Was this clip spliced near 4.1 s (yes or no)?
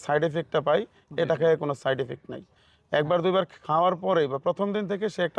no